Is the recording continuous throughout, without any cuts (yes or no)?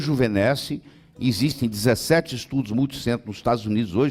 yes